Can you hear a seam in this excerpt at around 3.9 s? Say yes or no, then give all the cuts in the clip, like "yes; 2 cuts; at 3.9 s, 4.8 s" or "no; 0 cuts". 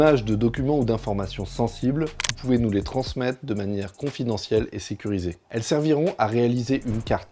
no; 1 cut; at 5.4 s